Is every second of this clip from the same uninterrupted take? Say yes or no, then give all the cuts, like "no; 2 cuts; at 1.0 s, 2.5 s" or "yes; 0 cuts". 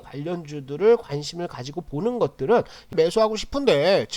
no; 1 cut; at 2.9 s